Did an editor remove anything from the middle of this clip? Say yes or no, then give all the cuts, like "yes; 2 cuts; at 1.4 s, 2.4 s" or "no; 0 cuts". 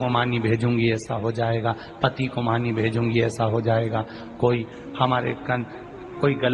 yes; 1 cut; at 2.0 s